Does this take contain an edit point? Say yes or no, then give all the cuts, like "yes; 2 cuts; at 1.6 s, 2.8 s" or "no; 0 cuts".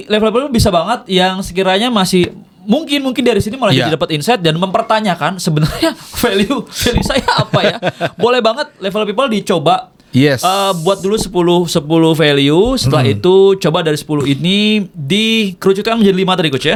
no; 0 cuts